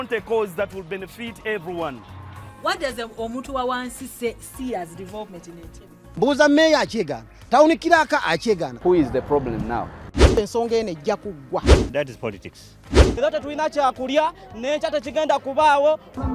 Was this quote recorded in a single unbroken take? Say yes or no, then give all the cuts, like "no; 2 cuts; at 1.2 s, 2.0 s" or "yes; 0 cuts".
no; 1 cut; at 6.0 s